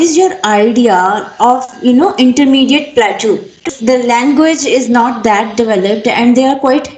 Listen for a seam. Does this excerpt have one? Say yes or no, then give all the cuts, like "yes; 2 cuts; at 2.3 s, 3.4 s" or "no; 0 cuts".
yes; 1 cut; at 3.7 s